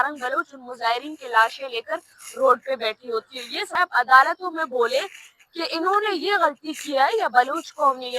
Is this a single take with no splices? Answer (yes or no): no